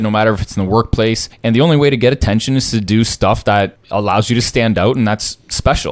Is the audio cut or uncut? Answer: cut